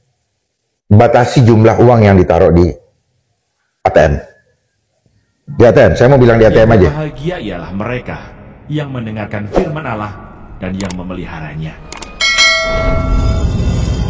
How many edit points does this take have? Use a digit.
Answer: 1